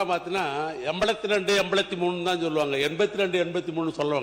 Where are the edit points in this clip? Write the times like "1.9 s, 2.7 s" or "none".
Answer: none